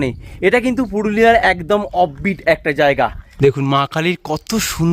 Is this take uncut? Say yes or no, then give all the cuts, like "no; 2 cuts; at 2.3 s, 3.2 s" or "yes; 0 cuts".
no; 1 cut; at 3.2 s